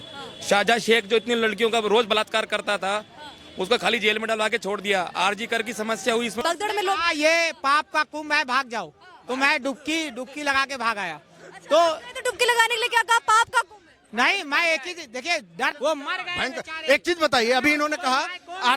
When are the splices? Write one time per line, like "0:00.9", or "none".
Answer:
0:06.4
0:15.7